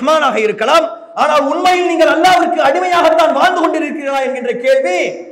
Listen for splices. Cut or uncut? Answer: uncut